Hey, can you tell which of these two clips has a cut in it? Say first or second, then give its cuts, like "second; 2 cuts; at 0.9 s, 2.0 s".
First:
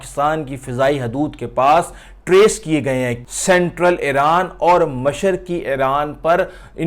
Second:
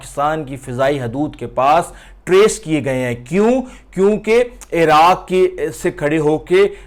first; 1 cut; at 3.2 s